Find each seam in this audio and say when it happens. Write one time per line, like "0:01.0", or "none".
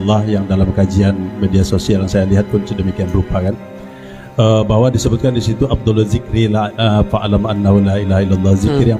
none